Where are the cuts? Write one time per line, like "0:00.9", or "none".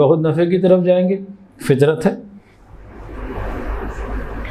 none

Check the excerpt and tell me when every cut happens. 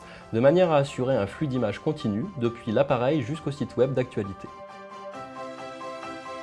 0:02.9

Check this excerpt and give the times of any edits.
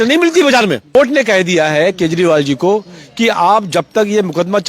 0:00.9

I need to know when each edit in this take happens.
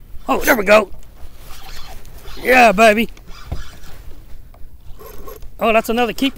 none

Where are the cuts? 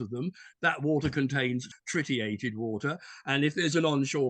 0:01.7

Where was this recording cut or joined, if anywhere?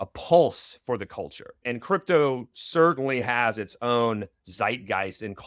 0:01.7

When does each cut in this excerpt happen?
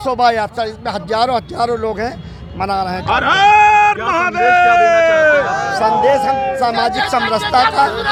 none

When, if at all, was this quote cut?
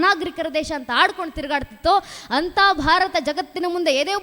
none

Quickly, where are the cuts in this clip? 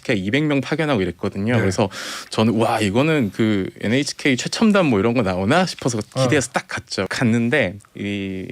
0:07.1

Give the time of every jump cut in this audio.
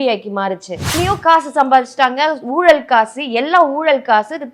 0:01.0

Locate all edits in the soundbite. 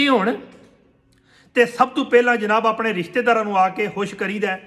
none

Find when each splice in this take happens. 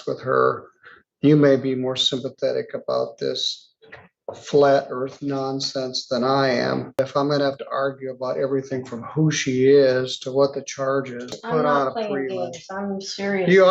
0:07.0
0:11.4

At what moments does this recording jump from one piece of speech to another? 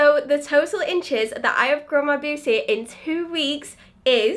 none

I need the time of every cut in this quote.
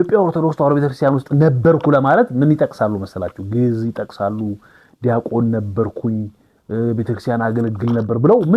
none

